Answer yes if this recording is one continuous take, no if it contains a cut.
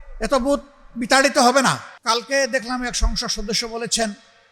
no